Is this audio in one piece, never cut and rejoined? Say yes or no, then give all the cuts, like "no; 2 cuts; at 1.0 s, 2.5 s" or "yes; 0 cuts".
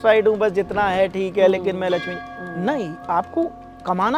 yes; 0 cuts